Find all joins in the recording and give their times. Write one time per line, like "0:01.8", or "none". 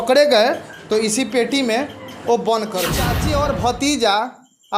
0:03.2